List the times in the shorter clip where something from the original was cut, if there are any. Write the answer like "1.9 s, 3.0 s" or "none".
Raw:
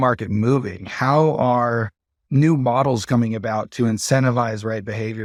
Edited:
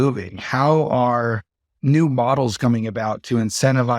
none